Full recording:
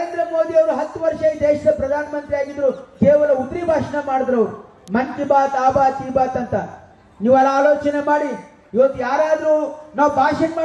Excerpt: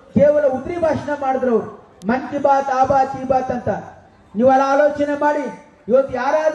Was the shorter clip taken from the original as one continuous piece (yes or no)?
yes